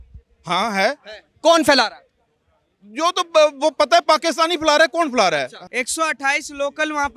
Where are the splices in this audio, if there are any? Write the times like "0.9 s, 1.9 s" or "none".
5.6 s